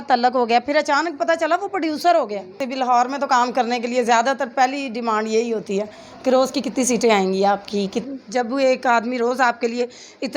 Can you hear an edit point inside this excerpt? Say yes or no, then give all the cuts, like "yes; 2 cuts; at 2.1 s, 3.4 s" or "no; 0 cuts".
yes; 2 cuts; at 2.7 s, 8.1 s